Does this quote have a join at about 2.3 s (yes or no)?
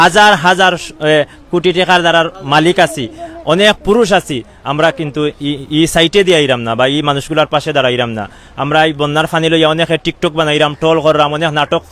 no